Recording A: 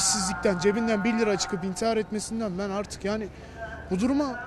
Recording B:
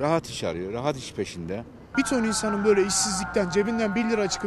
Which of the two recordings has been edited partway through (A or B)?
B